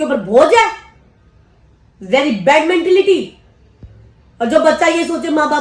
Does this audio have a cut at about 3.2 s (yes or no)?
no